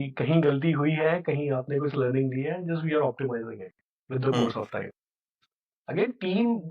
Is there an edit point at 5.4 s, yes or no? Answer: yes